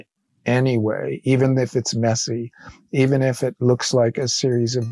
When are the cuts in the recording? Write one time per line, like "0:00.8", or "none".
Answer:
none